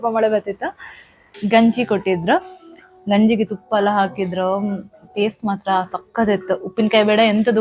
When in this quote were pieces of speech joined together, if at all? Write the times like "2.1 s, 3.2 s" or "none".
1.3 s